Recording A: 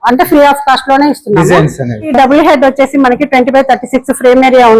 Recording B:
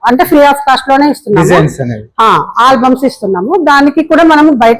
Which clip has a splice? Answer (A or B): A